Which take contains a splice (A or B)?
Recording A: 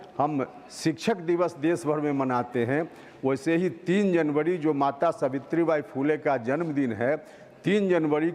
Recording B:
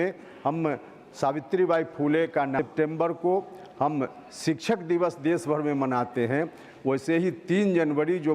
B